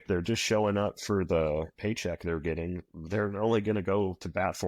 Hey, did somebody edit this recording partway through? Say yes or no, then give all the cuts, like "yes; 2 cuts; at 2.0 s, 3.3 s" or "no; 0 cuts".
yes; 2 cuts; at 1.7 s, 2.9 s